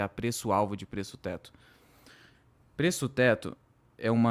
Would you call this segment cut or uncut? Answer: uncut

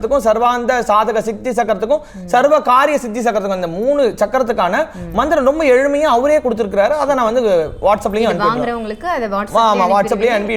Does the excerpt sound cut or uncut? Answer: uncut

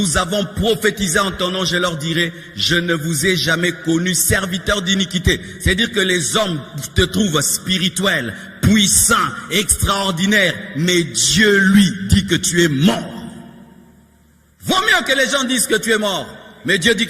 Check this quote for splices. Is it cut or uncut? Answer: uncut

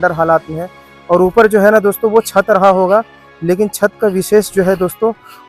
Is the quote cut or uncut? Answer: uncut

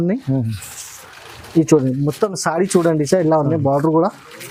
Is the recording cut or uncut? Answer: uncut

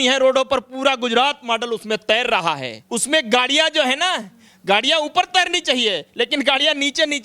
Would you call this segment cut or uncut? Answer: cut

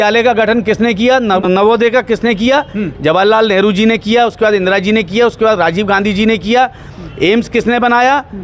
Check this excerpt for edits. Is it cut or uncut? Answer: cut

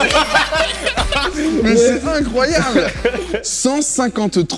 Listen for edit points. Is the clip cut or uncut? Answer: uncut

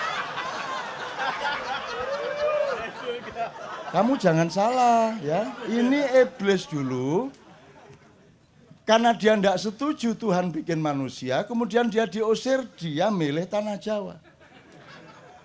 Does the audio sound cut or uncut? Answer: uncut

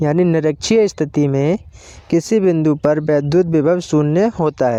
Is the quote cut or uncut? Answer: uncut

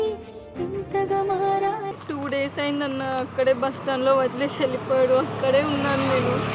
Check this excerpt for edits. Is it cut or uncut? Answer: cut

